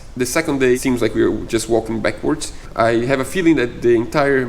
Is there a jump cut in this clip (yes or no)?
yes